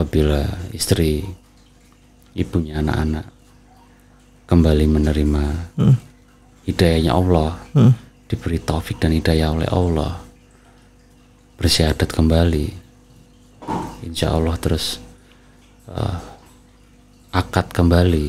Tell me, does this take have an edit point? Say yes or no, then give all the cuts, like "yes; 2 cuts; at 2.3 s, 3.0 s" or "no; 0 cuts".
no; 0 cuts